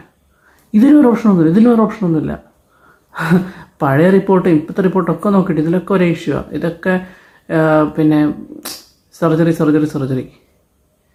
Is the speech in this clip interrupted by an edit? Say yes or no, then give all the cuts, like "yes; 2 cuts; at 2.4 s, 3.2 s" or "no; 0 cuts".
no; 0 cuts